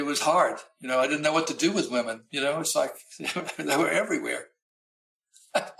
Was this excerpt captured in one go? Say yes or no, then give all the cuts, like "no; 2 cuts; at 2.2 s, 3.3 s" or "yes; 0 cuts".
yes; 0 cuts